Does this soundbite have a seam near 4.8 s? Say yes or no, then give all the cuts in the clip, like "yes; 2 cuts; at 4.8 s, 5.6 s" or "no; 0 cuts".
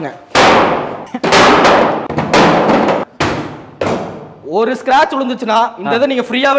no; 3 cuts; at 1.0 s, 2.0 s, 3.1 s